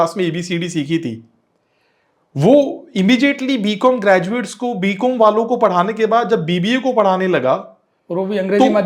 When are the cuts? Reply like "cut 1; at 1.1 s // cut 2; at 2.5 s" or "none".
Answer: none